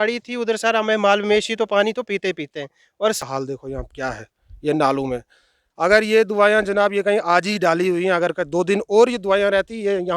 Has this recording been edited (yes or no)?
yes